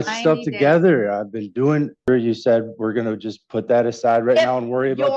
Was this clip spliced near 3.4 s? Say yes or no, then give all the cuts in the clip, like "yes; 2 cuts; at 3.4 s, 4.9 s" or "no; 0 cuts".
no; 1 cut; at 2.1 s